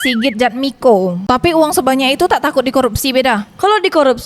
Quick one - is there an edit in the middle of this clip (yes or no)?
yes